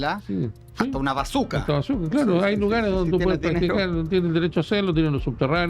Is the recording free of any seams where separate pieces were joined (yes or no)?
yes